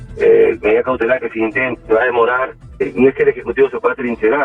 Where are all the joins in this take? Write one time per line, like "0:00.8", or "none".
0:02.8